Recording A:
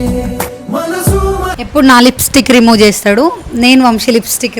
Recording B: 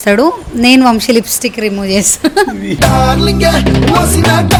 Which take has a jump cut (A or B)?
A